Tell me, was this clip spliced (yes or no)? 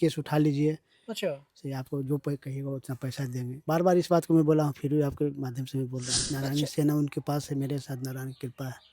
yes